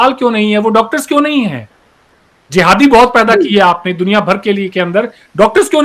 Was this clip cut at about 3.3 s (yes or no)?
no